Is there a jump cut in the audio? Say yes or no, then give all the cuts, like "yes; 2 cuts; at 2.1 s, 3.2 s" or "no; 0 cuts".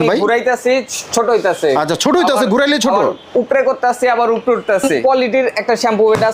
yes; 1 cut; at 5.0 s